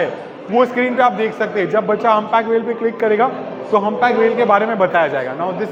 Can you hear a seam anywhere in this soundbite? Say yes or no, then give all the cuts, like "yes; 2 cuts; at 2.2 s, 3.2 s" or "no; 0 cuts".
no; 0 cuts